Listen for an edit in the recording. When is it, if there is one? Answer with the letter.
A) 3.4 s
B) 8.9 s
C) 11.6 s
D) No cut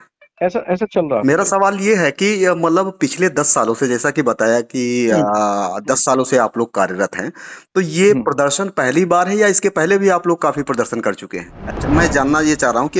C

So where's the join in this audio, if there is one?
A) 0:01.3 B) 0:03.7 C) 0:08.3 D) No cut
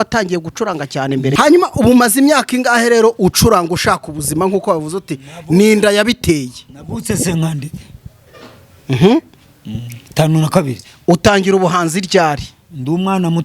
A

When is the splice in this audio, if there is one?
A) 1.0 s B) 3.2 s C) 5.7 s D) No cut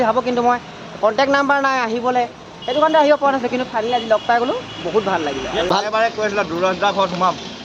C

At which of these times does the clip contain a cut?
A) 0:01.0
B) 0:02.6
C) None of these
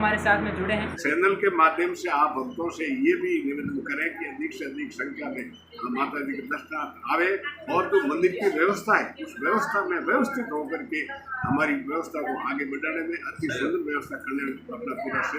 A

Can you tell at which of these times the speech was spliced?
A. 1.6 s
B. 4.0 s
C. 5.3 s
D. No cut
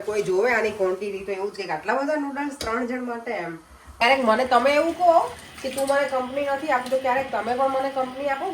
B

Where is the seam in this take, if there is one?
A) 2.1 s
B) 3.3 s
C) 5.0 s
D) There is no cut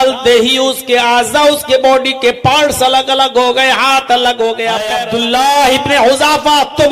C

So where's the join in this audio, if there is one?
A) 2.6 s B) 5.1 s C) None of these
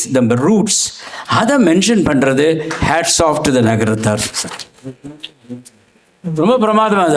C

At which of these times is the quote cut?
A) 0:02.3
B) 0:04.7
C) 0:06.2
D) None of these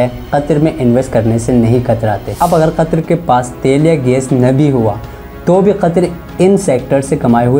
A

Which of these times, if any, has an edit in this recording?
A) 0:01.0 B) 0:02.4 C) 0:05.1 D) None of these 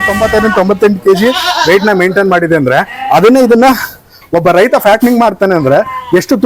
D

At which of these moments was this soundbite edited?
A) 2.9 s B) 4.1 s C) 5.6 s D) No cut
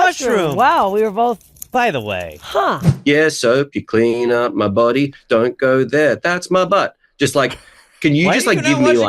A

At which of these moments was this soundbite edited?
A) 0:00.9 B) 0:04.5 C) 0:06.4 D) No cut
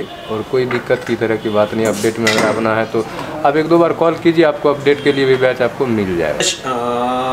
C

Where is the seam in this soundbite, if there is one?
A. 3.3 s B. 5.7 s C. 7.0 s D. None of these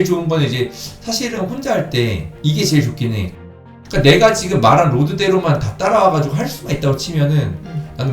A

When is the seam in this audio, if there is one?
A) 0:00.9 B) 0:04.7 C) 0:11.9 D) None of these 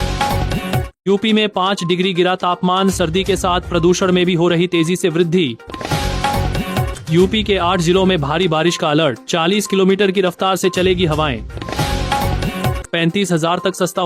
A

